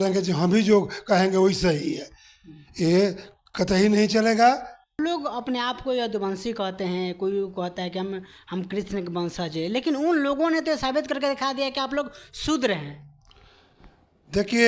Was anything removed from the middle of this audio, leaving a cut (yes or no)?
yes